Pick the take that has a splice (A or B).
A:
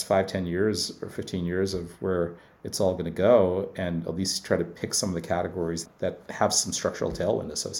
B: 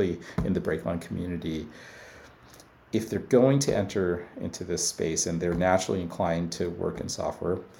A